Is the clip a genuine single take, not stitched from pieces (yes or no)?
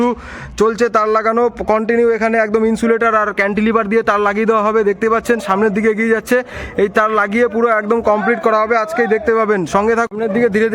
yes